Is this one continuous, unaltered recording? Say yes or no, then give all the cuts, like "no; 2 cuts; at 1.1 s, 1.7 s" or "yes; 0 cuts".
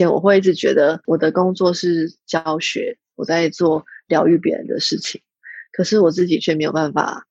no; 1 cut; at 1.0 s